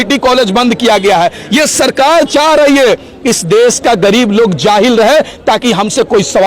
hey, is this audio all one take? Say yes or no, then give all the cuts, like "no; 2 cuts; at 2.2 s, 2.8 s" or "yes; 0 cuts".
yes; 0 cuts